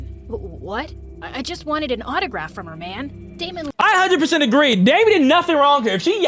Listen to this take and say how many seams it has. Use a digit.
1